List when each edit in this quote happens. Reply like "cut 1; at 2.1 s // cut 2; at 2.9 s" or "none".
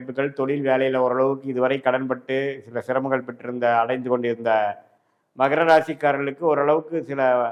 none